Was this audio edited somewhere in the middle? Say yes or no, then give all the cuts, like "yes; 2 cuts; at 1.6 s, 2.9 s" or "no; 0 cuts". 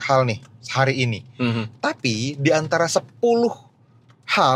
no; 0 cuts